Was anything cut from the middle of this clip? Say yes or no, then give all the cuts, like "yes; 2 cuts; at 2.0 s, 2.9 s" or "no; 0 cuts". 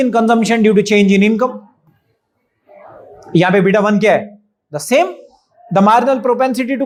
no; 0 cuts